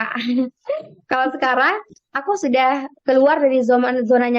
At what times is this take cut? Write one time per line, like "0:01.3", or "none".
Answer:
none